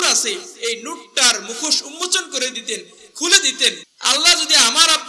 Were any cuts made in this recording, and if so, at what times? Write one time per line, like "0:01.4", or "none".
0:03.9